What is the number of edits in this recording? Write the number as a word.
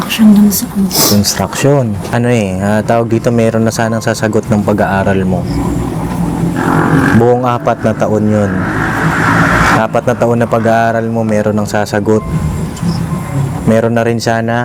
one